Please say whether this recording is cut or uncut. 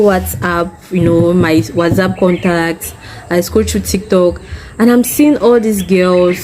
uncut